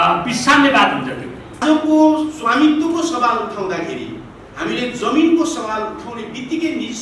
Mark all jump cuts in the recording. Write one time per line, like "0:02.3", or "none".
0:01.6